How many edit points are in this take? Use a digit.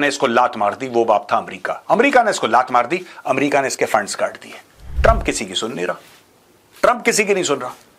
1